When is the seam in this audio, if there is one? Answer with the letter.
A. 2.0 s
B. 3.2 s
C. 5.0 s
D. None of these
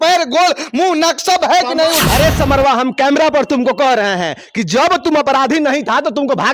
A